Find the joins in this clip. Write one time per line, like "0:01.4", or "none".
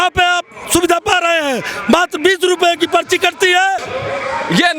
0:03.9